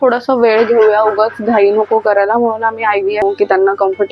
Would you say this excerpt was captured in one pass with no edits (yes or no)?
no